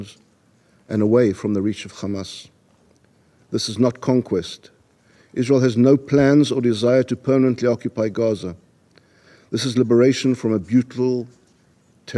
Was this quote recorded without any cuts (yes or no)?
yes